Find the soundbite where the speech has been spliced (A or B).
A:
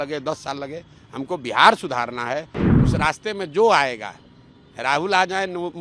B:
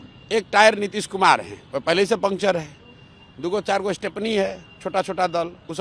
A